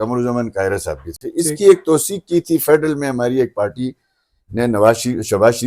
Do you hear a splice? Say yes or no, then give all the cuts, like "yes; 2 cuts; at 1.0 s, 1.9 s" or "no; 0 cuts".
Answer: no; 0 cuts